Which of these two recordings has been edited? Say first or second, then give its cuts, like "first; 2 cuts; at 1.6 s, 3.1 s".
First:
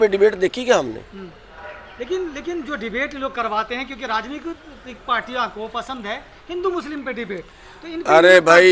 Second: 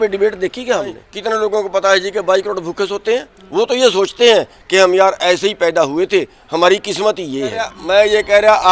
second; 3 cuts; at 1.1 s, 3.4 s, 7.8 s